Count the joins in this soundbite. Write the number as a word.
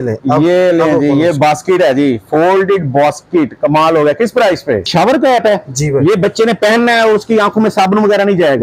one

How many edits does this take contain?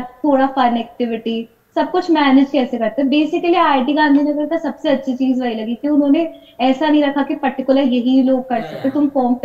zero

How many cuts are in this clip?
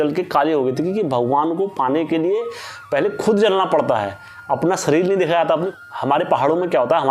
one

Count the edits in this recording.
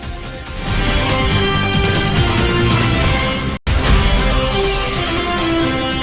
one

